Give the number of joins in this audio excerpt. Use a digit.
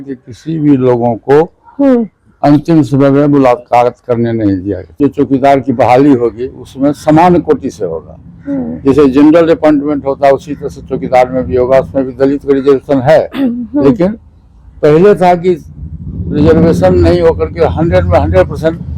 1